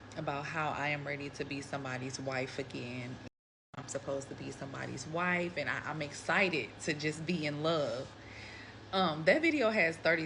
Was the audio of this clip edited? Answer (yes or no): yes